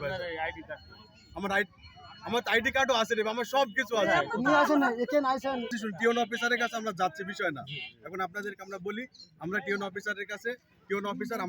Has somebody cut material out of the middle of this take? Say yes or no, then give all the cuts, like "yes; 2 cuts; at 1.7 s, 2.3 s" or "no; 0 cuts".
yes; 1 cut; at 5.8 s